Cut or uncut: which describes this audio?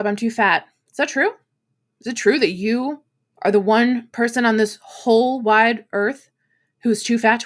uncut